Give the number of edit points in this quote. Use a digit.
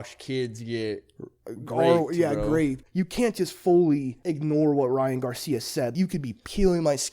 3